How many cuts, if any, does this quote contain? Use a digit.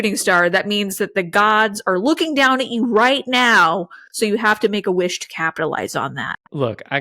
0